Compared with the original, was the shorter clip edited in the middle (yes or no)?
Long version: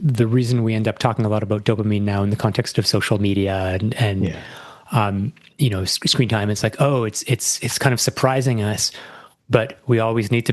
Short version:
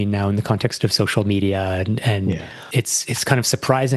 yes